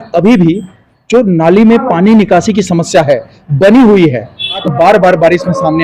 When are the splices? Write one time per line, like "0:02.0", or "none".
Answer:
0:04.6